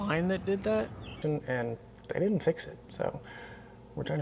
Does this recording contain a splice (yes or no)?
yes